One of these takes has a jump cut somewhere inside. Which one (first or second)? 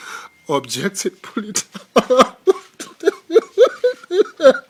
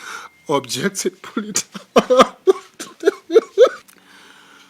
second